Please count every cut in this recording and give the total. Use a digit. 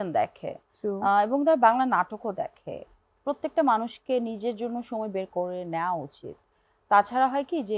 1